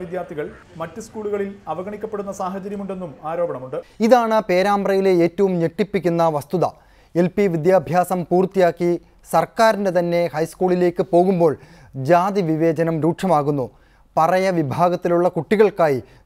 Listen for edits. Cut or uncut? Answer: uncut